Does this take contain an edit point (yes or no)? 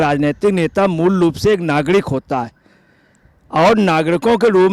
no